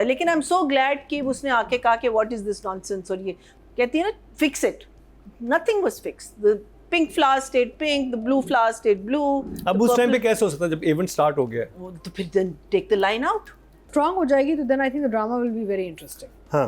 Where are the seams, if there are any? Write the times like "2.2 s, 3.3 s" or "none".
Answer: 3.5 s, 13.9 s